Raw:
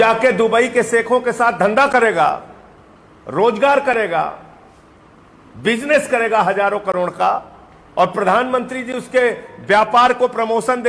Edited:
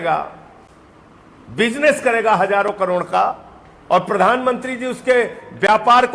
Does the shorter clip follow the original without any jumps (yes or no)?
yes